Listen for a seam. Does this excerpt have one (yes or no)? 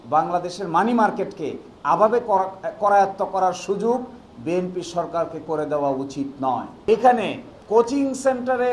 yes